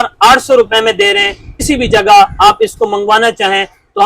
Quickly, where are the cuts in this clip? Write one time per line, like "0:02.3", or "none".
0:01.6